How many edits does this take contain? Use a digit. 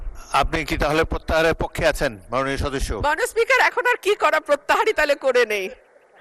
0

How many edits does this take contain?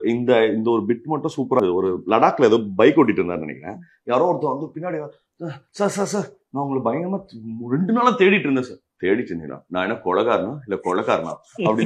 1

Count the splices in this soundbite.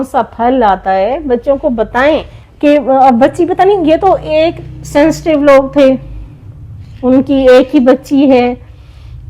1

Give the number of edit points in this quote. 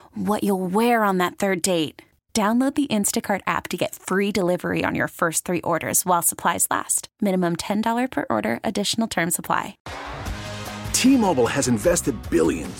1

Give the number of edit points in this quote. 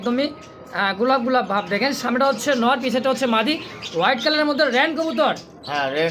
0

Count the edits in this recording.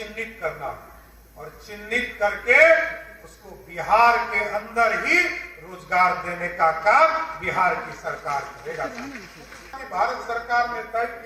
1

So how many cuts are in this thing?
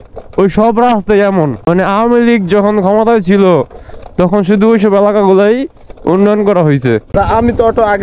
2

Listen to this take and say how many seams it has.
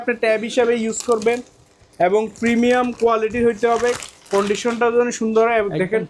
0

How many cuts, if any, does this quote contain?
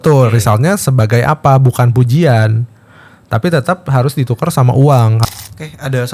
1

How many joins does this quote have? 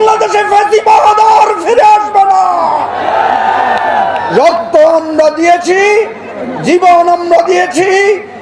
0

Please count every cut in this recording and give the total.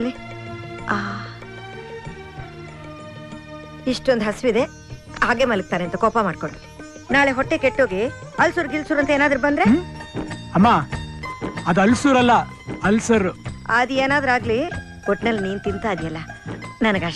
0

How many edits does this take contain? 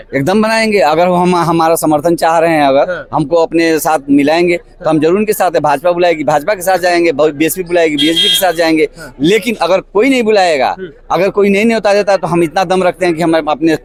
0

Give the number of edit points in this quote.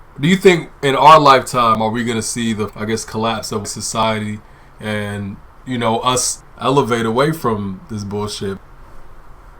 3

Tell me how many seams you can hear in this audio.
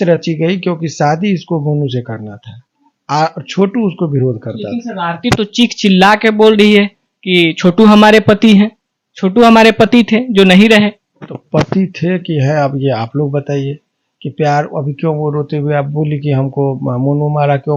0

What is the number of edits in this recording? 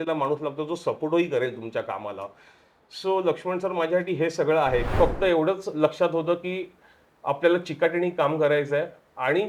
1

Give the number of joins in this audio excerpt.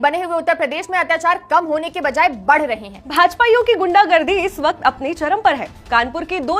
1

